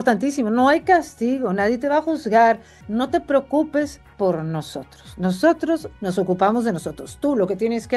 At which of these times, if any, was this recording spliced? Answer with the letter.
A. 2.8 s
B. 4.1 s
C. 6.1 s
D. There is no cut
A